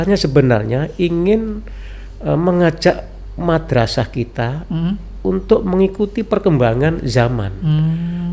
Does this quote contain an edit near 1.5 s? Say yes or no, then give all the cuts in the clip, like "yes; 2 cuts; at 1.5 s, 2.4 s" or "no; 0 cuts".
no; 0 cuts